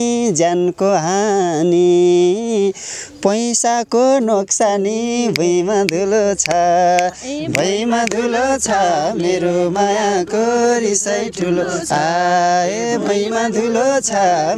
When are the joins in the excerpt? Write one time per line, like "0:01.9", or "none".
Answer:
none